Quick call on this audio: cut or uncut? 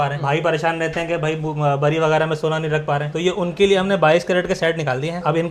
uncut